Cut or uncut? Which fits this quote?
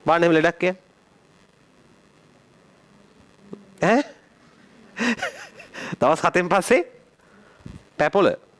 uncut